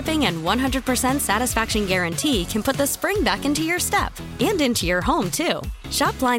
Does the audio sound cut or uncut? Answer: uncut